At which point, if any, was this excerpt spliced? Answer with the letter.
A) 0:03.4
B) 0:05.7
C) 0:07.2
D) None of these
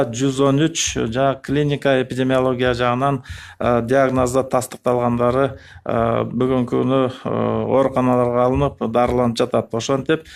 D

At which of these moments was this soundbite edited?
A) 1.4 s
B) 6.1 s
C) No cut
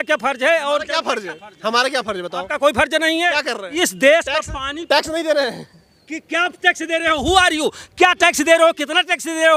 C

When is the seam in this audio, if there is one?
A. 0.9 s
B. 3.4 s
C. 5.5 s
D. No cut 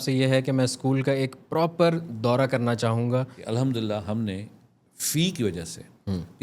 B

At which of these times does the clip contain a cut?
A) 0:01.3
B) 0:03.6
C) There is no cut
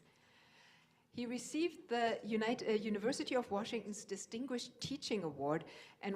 B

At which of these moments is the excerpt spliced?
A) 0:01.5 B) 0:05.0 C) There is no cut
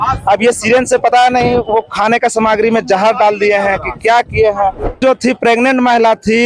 B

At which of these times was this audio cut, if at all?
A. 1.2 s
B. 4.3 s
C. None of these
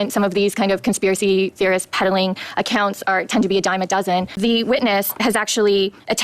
B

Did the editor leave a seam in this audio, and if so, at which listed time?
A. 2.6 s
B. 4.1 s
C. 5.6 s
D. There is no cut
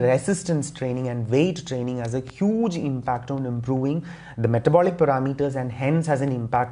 D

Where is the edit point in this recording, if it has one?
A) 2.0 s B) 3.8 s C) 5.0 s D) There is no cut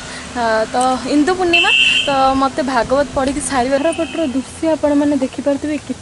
B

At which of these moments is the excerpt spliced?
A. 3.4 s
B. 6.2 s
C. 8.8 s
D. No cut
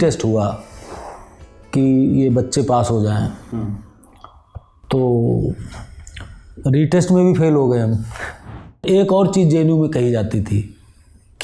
C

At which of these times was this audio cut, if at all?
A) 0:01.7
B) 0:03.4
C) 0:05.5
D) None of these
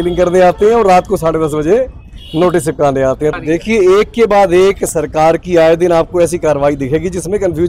B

